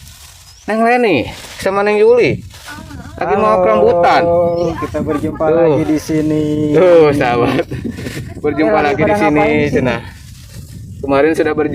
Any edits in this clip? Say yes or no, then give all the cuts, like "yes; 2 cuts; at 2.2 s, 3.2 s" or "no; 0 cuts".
no; 0 cuts